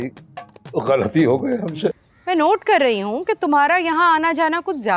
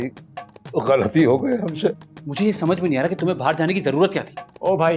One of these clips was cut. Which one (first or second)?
first